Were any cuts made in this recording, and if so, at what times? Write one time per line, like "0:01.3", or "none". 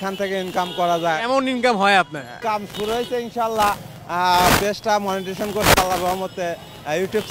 none